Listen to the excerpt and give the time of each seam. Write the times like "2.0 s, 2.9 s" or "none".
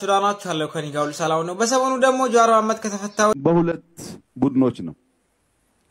3.4 s